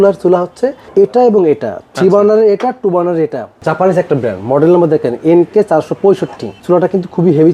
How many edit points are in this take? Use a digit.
2